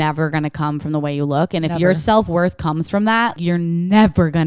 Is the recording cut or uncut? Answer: cut